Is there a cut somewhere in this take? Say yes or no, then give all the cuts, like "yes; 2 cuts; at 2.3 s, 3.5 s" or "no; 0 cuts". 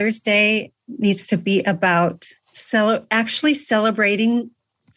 no; 0 cuts